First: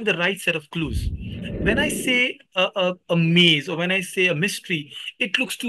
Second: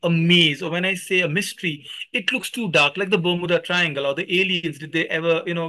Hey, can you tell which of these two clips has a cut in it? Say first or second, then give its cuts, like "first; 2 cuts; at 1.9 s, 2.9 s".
first; 1 cut; at 1.3 s